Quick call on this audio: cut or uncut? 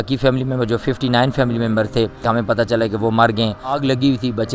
cut